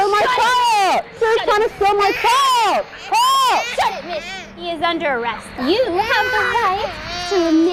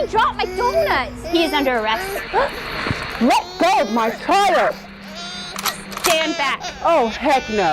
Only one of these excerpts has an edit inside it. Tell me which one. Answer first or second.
second